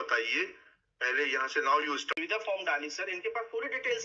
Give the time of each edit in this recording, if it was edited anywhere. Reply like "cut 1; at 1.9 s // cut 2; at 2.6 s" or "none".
cut 1; at 2.0 s